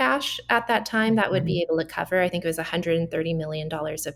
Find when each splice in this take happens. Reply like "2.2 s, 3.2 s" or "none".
none